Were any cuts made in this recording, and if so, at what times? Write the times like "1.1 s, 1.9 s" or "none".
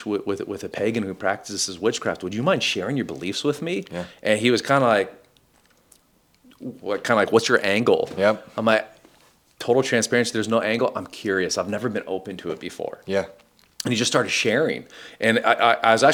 none